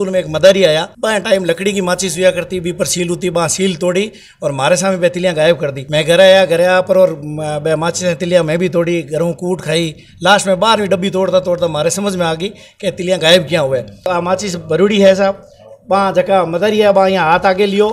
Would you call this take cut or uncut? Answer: cut